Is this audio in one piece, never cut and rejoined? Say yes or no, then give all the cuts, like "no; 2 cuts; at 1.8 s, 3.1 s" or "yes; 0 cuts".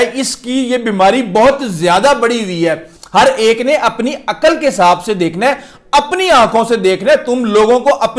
no; 1 cut; at 2.9 s